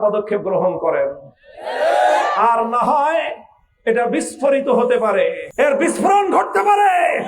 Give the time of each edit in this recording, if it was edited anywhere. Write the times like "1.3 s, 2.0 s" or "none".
5.4 s